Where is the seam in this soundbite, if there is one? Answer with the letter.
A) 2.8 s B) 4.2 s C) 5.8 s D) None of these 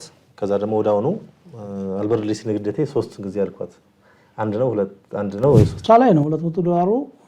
C